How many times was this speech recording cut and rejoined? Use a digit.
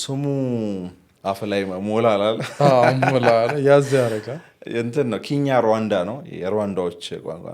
1